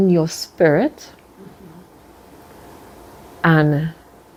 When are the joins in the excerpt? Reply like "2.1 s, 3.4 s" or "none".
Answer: none